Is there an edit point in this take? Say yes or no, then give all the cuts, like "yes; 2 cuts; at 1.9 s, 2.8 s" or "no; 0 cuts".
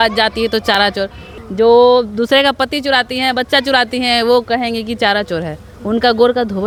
no; 0 cuts